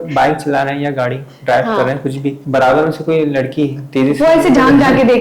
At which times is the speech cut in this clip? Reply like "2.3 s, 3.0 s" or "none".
2.4 s